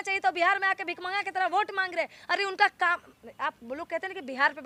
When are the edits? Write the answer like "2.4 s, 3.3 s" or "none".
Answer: none